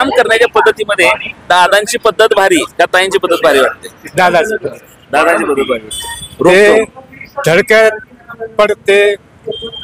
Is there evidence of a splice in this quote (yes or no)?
no